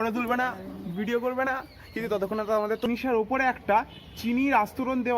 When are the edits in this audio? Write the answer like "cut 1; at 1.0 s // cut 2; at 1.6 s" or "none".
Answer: cut 1; at 2.8 s